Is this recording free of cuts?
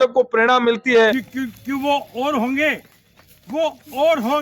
no; 1 cut; at 1.2 s

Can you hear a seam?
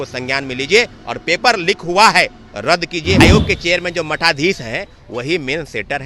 yes; 1 cut; at 3.2 s

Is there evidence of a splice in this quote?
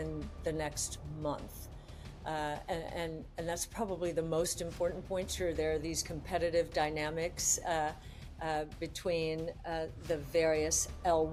no; 0 cuts

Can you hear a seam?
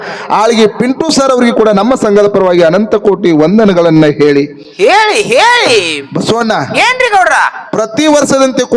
no; 0 cuts

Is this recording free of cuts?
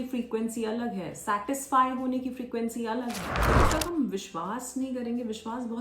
no; 1 cut; at 3.5 s

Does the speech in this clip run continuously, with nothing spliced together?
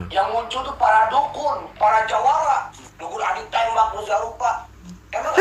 yes; 0 cuts

